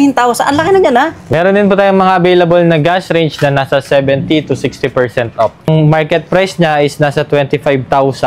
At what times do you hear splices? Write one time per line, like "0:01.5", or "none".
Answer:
0:01.2
0:05.7